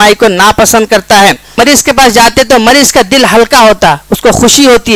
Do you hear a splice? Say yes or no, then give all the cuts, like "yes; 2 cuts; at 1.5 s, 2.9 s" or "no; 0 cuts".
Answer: yes; 1 cut; at 1.6 s